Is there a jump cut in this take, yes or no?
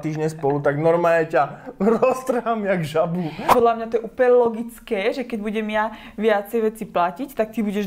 yes